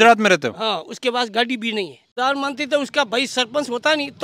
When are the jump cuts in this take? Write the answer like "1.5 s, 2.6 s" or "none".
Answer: 2.1 s